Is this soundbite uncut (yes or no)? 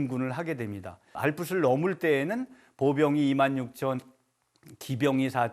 no